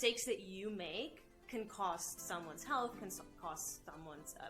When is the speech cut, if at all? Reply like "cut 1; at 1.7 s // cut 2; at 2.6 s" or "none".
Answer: none